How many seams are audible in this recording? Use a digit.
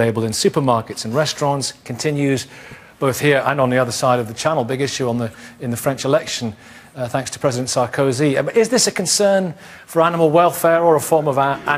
0